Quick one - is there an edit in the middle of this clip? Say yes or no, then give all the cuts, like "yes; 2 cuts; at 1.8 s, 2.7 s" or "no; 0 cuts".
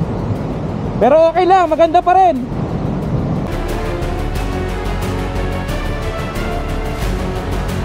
no; 0 cuts